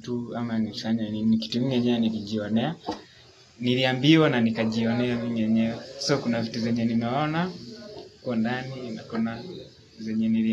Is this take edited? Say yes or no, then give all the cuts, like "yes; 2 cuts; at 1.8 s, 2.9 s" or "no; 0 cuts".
no; 0 cuts